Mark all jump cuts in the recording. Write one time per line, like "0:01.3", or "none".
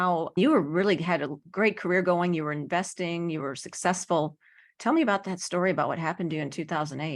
none